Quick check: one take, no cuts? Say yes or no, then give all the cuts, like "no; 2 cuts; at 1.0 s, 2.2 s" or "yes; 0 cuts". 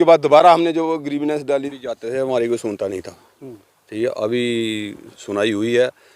no; 1 cut; at 1.7 s